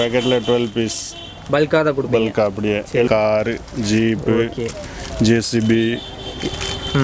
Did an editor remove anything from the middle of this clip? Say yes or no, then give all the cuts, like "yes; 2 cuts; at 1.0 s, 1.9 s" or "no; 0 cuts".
yes; 1 cut; at 3.1 s